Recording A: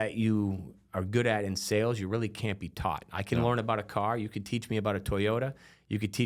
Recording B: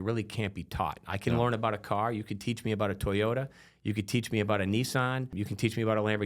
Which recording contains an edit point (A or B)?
B